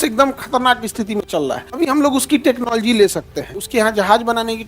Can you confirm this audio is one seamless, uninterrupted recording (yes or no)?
no